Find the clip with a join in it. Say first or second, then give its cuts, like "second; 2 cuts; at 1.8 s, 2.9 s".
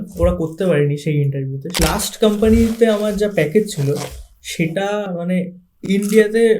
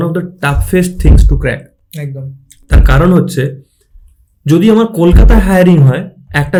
first; 1 cut; at 1.7 s